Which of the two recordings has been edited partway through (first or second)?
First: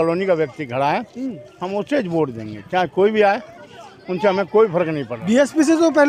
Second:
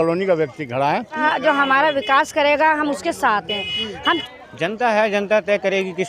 second